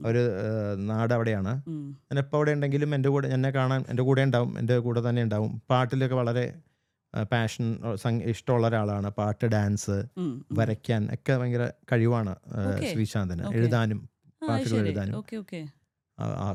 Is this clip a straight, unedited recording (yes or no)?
yes